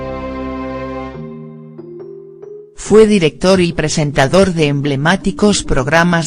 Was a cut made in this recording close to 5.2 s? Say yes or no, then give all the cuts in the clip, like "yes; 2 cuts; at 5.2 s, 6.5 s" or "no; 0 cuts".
yes; 1 cut; at 5.2 s